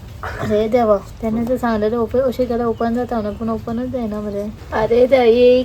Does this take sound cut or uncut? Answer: cut